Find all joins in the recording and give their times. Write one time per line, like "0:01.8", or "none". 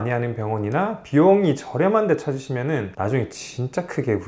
none